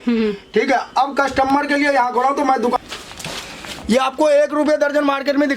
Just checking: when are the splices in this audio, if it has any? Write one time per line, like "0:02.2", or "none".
0:02.8